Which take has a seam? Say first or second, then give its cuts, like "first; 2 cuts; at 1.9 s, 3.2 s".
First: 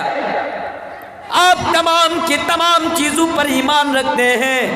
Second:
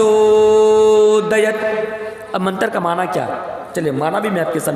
first; 1 cut; at 1.3 s